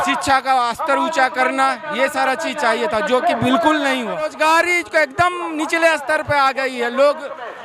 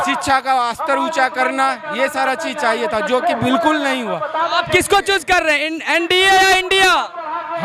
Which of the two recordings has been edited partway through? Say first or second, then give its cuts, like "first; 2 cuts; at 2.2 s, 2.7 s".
first; 1 cut; at 4.3 s